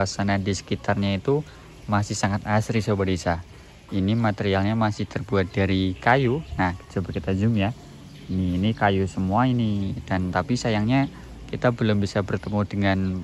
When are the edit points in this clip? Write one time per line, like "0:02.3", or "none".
none